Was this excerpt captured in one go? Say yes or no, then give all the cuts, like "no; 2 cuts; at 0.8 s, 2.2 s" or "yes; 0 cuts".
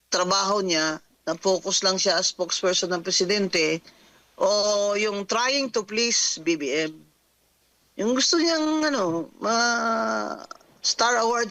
yes; 0 cuts